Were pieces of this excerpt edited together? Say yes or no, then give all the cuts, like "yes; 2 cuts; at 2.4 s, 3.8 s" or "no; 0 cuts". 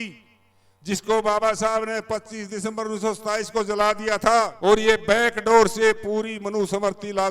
yes; 1 cut; at 4.5 s